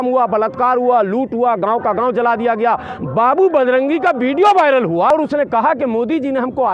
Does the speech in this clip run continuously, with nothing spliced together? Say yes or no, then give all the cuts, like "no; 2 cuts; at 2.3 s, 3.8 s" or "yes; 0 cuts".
no; 1 cut; at 5.1 s